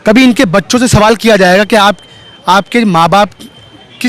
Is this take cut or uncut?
uncut